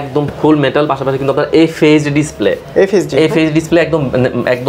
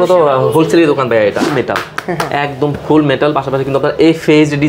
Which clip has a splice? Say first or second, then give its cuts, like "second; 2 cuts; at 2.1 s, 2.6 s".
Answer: second; 1 cut; at 1.5 s